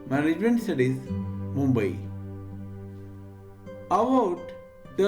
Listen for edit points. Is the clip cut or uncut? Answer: cut